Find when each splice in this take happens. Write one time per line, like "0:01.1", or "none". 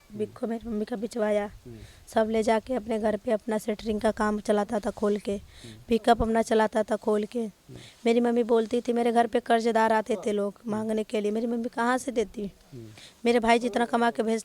none